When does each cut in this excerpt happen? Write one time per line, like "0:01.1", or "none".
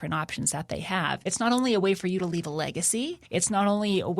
0:01.2
0:03.2